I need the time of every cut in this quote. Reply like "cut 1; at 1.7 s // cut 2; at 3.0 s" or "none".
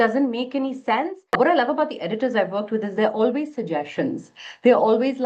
cut 1; at 1.4 s